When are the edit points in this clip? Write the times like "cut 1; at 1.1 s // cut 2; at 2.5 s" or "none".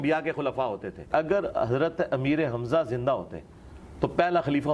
cut 1; at 1.1 s